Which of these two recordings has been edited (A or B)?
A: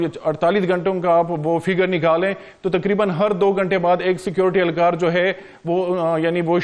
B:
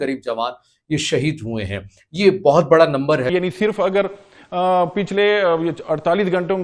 B